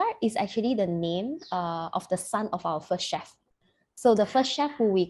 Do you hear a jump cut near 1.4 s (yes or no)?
no